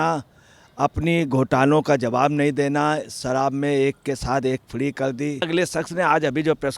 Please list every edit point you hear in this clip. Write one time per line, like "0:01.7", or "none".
0:05.5